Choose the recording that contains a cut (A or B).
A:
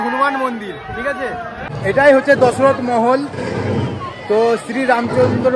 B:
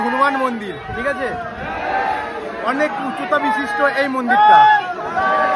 A